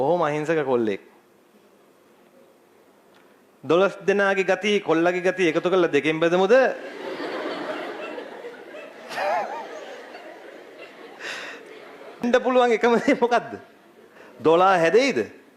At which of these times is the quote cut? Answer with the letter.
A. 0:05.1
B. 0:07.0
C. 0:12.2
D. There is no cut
C